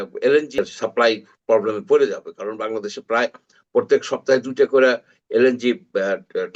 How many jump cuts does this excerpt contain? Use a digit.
0